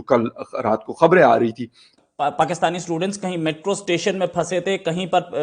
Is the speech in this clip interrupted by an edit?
yes; 1 cut; at 1.9 s

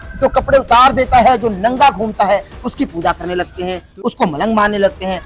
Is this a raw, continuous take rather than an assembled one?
yes; 0 cuts

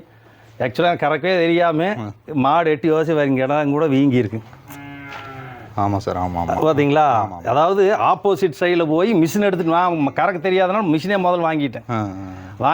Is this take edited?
no; 0 cuts

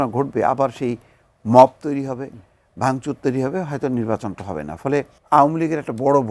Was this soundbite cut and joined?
yes; 1 cut; at 5.2 s

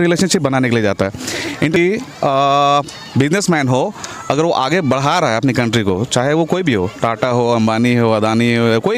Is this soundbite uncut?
no; 1 cut; at 1.8 s

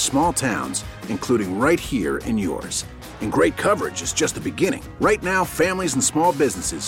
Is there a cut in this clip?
no; 0 cuts

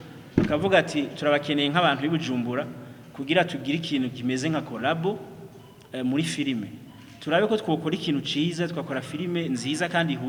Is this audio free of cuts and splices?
yes; 0 cuts

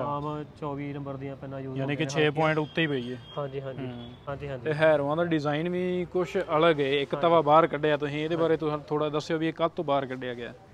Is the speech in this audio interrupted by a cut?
yes; 1 cut; at 4.2 s

